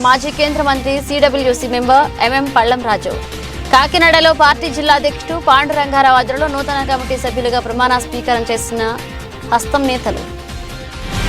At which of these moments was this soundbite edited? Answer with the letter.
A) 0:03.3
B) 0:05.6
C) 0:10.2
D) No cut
D